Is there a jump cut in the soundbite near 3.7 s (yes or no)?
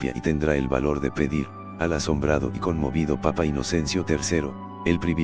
yes